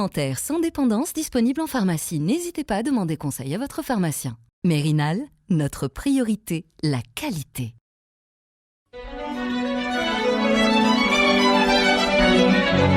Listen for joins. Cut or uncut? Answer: uncut